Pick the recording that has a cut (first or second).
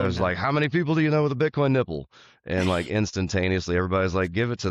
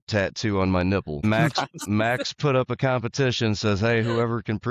second